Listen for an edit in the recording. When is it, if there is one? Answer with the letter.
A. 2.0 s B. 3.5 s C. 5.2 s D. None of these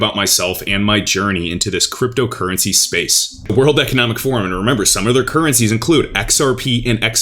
B